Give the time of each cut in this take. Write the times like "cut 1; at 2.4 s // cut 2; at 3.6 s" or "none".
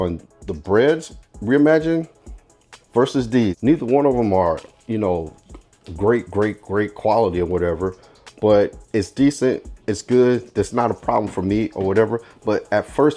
cut 1; at 3.6 s